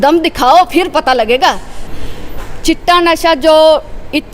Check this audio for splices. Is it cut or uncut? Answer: cut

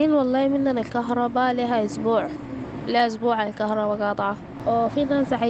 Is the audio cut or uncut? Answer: cut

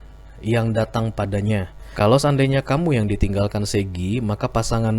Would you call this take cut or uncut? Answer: cut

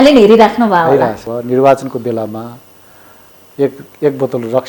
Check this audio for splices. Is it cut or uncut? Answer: cut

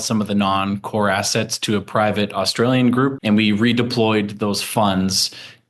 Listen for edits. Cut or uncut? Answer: cut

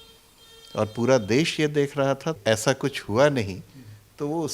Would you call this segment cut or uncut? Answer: cut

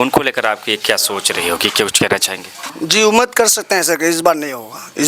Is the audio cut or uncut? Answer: cut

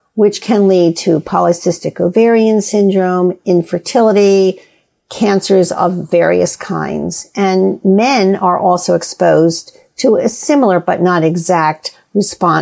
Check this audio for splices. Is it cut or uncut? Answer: uncut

